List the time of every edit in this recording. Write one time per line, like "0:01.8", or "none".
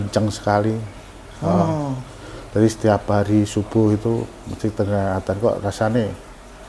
none

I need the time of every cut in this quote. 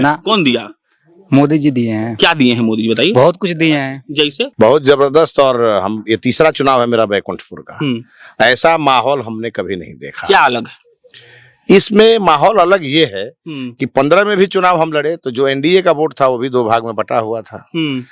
0:04.4

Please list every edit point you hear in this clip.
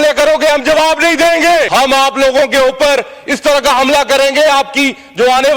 0:01.7

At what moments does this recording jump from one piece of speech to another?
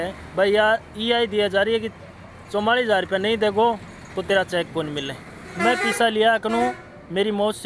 0:05.5

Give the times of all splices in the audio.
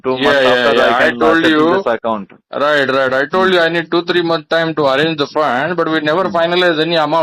none

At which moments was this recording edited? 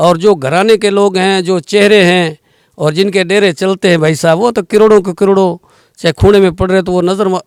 none

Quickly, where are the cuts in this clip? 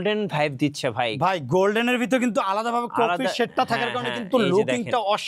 none

